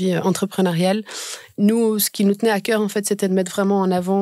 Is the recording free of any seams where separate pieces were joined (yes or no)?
no